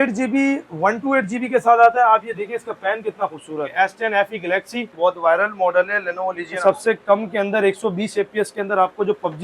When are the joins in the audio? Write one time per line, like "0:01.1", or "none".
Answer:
0:03.7
0:04.9
0:06.6